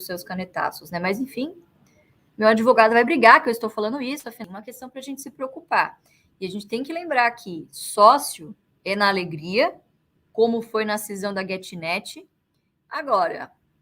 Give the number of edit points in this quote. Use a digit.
2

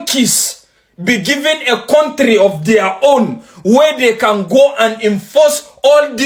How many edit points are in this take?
0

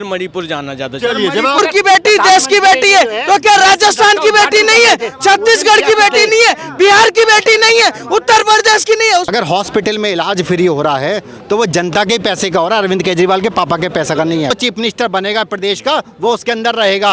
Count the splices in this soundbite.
3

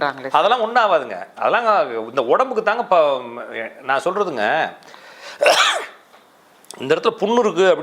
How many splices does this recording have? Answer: 0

